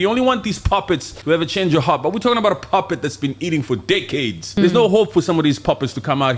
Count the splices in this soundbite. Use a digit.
2